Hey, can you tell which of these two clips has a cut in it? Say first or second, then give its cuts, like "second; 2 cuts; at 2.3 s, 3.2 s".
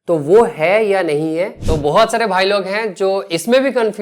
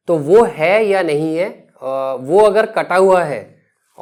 first; 1 cut; at 1.6 s